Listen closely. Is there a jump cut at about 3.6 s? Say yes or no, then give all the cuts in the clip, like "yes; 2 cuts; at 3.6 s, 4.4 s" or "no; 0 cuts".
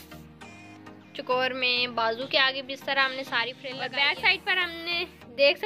yes; 1 cut; at 3.6 s